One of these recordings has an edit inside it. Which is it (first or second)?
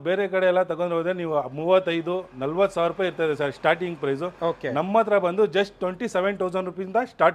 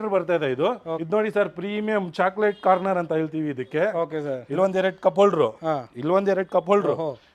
second